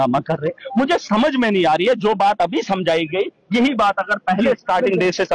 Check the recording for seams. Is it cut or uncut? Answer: uncut